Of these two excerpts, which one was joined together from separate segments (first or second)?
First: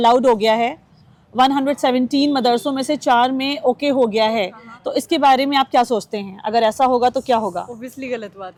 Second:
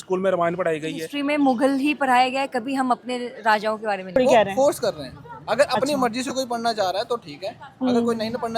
second